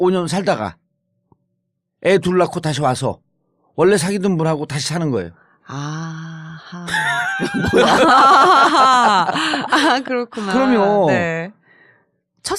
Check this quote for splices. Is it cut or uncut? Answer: uncut